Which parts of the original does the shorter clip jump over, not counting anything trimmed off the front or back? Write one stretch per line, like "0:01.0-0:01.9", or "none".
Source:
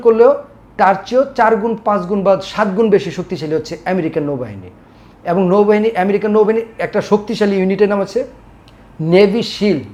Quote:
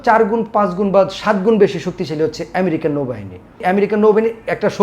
0:04.9-0:05.9